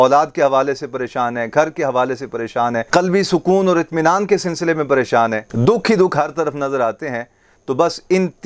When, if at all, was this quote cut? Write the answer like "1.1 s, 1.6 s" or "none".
none

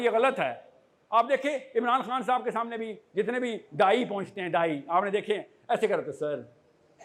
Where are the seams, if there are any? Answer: none

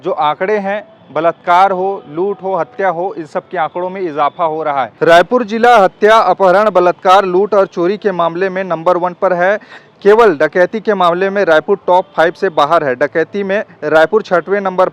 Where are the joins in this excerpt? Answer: 4.9 s

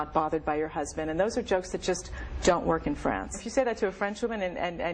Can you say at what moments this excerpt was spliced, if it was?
3.4 s

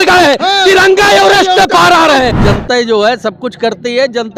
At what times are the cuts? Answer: 2.4 s

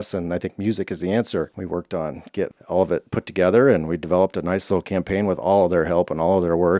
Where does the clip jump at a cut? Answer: 1.6 s

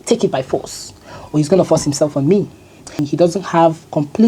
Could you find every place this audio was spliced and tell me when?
3.0 s

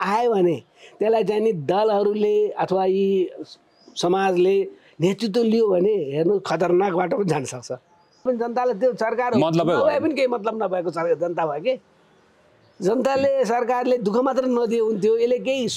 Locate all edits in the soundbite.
8.2 s

